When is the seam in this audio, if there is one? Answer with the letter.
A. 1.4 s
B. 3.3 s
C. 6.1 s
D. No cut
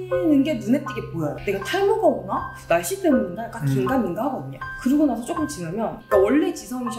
A